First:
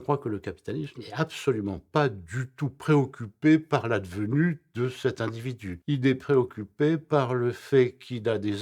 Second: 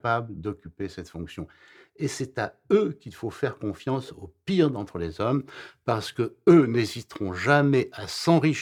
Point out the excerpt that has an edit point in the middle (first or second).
first